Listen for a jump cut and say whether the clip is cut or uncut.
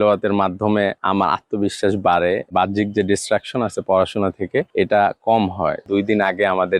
cut